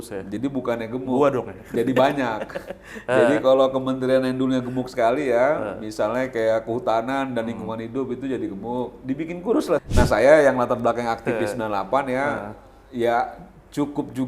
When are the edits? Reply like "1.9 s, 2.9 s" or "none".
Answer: 9.8 s